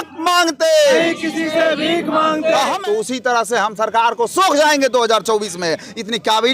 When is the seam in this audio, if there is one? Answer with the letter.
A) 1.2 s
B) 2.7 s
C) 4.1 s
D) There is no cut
B